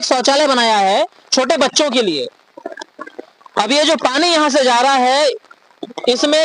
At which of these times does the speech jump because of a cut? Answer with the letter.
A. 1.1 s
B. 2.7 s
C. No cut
C